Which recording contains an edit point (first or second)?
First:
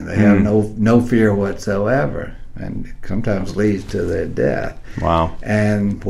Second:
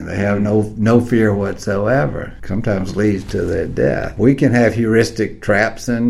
second